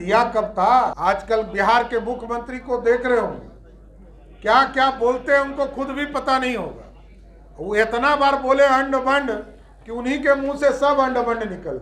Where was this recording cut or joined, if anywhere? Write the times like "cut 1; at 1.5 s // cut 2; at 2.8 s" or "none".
cut 1; at 1.0 s